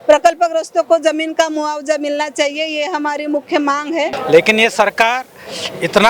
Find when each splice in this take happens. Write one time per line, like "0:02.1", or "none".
0:04.2